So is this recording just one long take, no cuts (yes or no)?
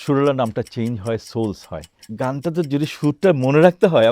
no